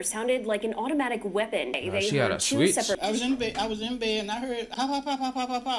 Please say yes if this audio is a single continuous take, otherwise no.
no